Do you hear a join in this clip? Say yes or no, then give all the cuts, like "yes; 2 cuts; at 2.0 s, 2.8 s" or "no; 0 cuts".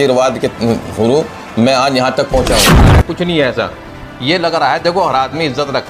yes; 1 cut; at 2.9 s